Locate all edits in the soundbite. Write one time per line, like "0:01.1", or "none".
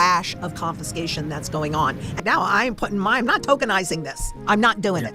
0:02.1

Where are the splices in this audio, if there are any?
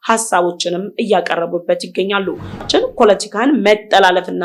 0:02.6

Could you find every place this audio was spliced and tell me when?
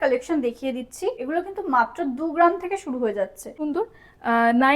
0:01.2
0:03.5

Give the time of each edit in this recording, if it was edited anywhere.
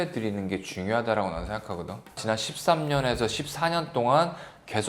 0:02.2

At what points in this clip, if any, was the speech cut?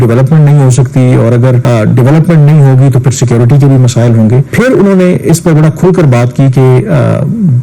0:01.6
0:04.5

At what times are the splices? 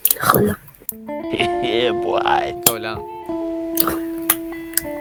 none

